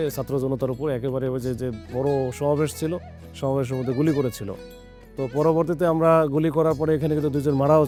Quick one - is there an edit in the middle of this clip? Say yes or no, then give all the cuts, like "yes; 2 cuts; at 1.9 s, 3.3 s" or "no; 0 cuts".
no; 0 cuts